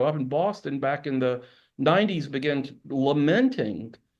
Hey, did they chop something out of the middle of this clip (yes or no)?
no